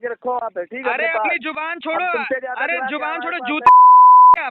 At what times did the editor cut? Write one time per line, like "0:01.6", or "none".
0:03.6